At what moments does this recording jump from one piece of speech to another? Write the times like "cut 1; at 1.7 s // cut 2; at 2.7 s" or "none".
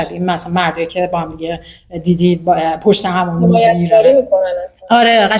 none